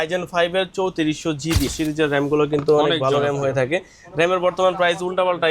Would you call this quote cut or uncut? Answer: cut